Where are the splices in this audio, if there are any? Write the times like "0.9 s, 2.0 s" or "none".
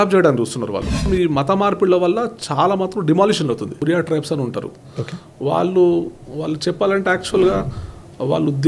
1.1 s, 3.8 s